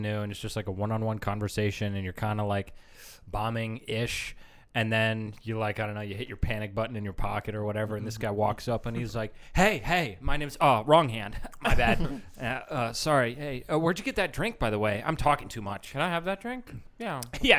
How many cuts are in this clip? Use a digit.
0